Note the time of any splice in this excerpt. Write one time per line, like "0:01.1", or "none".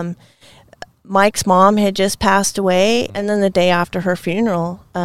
0:03.1